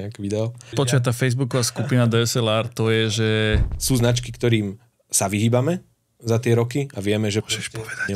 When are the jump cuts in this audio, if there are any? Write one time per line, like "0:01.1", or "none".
0:00.9
0:03.7